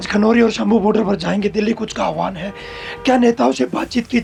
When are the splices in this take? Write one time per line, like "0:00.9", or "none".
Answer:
none